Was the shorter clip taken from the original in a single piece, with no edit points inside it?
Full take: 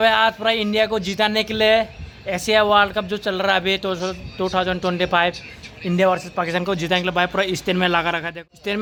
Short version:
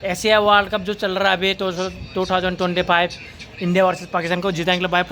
yes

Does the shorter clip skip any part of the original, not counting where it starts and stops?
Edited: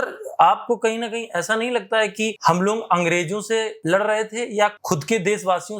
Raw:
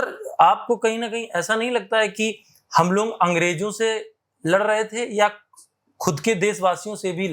yes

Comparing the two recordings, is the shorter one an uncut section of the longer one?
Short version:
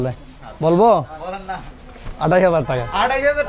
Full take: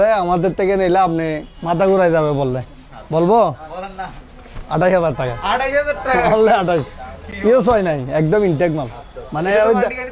yes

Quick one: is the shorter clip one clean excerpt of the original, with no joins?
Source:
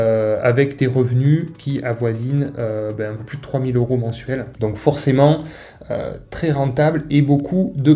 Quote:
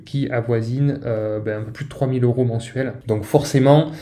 yes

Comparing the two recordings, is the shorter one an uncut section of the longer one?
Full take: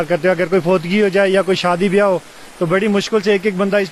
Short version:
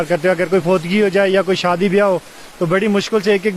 yes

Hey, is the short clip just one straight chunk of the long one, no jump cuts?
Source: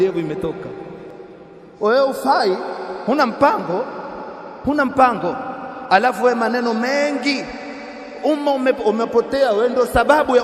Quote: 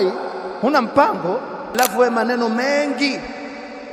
no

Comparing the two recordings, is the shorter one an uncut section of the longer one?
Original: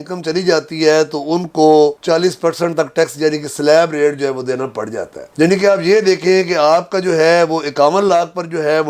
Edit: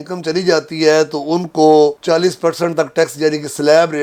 yes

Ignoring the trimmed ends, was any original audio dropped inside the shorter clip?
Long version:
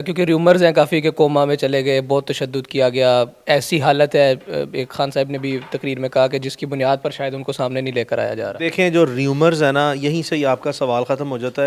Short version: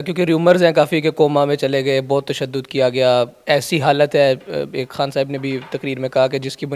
no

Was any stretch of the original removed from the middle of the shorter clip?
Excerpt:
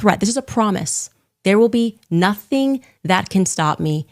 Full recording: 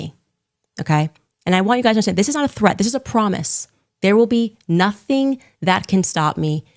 no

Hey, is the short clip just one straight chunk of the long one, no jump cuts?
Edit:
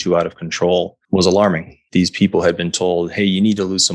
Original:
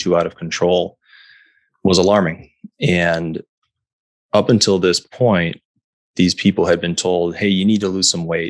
no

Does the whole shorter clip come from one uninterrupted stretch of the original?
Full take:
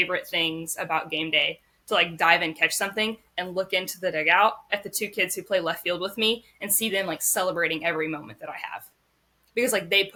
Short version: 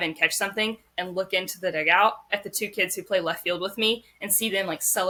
yes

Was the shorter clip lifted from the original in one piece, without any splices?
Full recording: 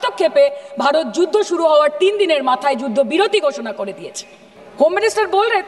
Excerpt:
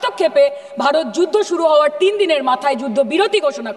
yes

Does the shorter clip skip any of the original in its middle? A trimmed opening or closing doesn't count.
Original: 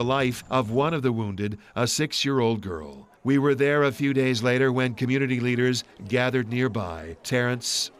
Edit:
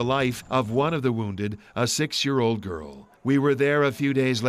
no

